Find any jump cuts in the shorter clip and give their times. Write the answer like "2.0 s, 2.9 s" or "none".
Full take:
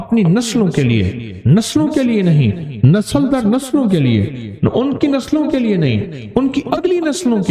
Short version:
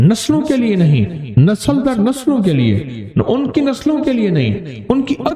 none